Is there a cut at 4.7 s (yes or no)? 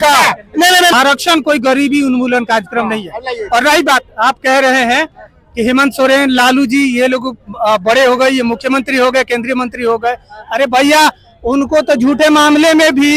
no